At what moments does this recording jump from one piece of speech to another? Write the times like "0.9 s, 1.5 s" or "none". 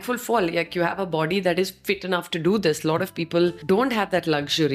3.6 s